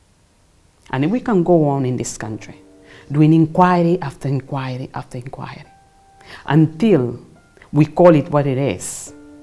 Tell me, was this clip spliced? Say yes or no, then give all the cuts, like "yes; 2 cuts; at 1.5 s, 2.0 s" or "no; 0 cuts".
no; 0 cuts